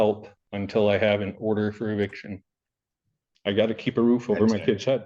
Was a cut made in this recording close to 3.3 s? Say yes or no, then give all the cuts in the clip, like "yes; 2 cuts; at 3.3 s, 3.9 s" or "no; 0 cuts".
yes; 1 cut; at 3.3 s